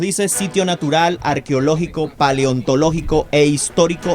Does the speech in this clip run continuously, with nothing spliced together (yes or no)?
yes